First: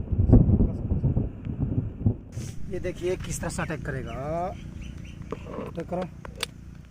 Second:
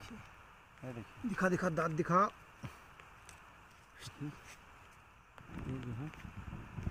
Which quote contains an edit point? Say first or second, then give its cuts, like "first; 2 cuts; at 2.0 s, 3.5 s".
first; 1 cut; at 2.3 s